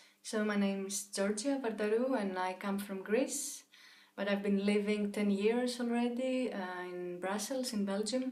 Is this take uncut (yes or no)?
yes